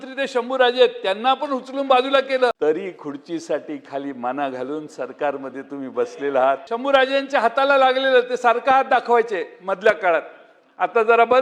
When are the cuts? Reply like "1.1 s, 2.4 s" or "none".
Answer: 2.5 s, 6.7 s